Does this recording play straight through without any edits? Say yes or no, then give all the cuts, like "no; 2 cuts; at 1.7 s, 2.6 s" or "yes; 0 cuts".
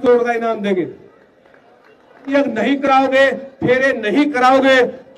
no; 1 cut; at 2.3 s